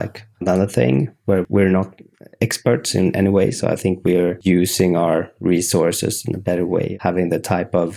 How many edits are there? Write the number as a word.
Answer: two